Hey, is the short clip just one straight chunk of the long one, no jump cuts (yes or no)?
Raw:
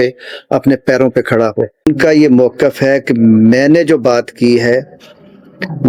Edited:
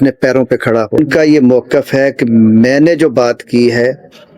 no